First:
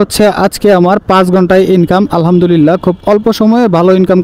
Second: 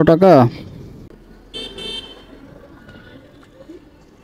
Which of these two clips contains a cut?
second; 1 cut; at 1.2 s

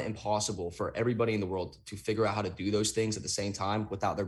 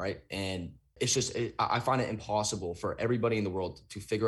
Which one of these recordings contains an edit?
second; 1 cut; at 1.0 s

